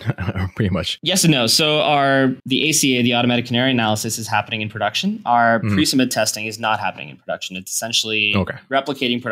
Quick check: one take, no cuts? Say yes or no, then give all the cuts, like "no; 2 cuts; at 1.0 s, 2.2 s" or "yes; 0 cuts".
no; 2 cuts; at 0.9 s, 2.4 s